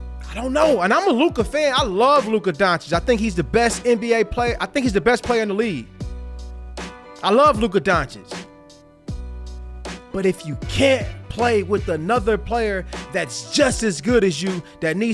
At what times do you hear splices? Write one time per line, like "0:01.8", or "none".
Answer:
0:08.2
0:10.0